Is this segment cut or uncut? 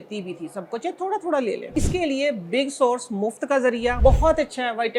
cut